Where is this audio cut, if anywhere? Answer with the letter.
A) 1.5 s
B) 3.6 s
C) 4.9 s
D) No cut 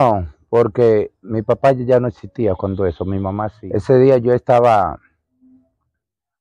B